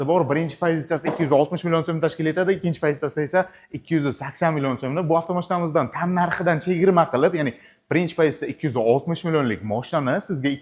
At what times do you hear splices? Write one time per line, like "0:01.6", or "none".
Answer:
none